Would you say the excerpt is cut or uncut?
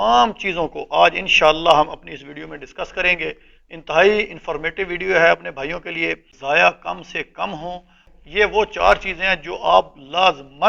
cut